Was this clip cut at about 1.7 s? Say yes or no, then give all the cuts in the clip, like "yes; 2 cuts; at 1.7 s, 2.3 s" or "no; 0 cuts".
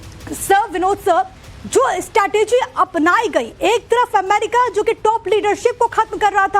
no; 1 cut; at 3.5 s